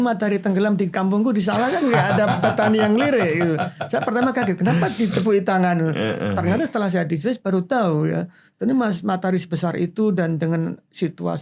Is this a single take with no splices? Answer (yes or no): yes